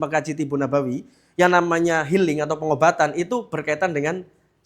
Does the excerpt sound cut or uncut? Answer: uncut